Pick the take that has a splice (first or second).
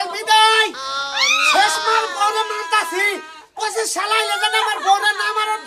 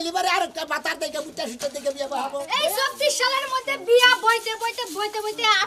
second